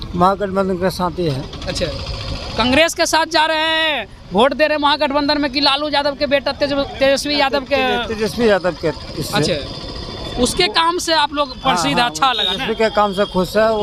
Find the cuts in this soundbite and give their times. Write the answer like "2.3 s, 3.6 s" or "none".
none